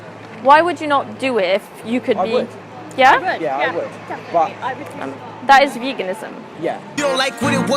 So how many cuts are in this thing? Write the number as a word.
one